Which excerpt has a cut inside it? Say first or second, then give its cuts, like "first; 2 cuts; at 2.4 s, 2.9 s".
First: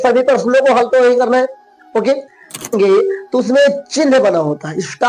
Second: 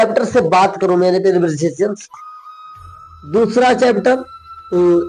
first; 1 cut; at 2.7 s